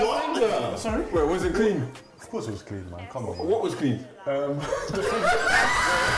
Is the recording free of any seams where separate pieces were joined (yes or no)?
yes